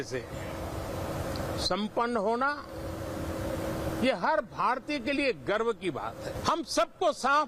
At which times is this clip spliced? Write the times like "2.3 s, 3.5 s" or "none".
6.3 s